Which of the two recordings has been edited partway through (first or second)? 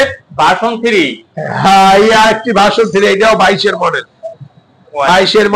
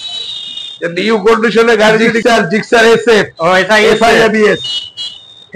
second